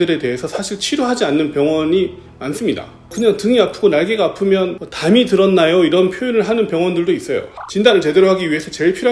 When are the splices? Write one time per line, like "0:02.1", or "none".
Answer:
0:07.5